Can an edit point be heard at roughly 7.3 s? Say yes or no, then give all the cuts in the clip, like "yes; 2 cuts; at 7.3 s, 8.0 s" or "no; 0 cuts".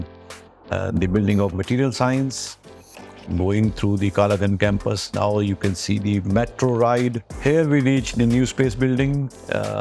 yes; 2 cuts; at 3.2 s, 7.3 s